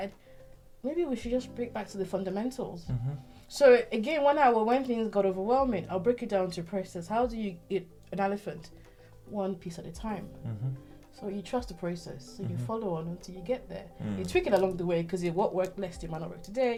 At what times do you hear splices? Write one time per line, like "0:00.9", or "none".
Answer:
none